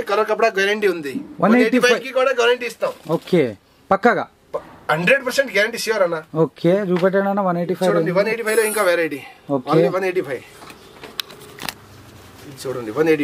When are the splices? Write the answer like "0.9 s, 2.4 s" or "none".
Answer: none